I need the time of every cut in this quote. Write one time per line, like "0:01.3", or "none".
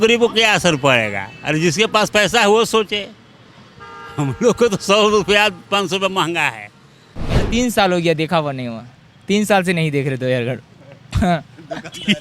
0:07.4